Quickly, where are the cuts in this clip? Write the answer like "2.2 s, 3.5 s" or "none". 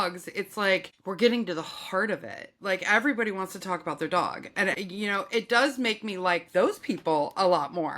1.0 s, 4.8 s

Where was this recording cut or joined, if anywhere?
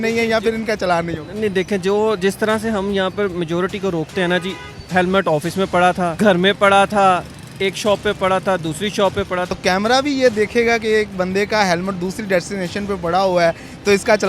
6.1 s, 9.5 s

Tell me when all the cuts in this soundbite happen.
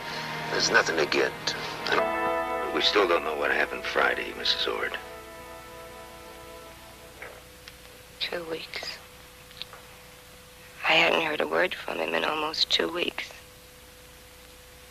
none

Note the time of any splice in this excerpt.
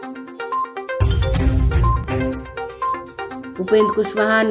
1.0 s, 2.9 s

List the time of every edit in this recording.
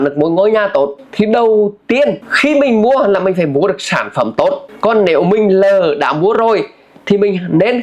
1.0 s, 2.3 s, 4.7 s

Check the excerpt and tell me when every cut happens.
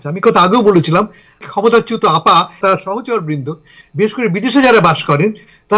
1.5 s, 2.6 s

